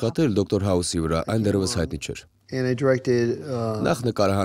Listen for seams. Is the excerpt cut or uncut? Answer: uncut